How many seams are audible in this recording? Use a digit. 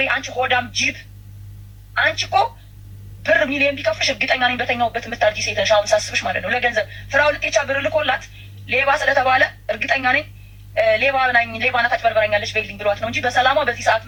0